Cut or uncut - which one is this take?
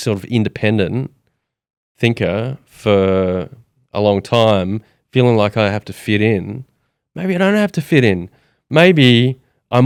uncut